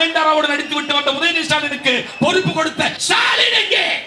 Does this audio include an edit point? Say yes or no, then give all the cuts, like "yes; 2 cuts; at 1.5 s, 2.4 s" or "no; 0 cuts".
yes; 1 cut; at 3.0 s